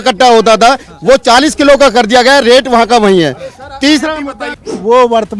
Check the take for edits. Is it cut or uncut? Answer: cut